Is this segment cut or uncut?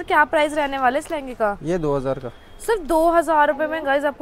uncut